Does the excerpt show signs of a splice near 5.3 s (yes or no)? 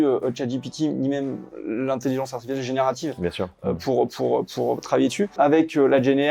yes